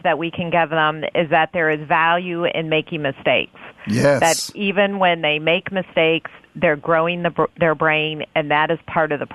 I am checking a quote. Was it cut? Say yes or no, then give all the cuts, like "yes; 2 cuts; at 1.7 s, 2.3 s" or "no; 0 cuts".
no; 0 cuts